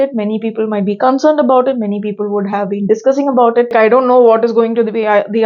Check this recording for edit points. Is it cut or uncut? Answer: cut